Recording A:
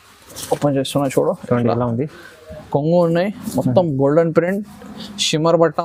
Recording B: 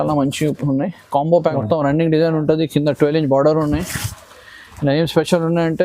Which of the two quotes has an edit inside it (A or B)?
B